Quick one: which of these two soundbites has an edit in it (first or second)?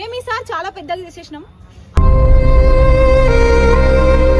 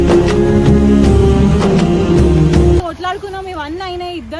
second